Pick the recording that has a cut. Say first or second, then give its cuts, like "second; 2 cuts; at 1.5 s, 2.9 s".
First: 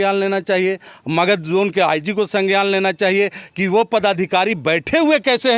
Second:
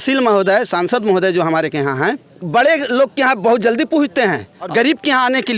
second; 2 cuts; at 2.3 s, 4.6 s